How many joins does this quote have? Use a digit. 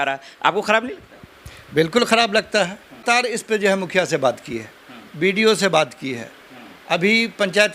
1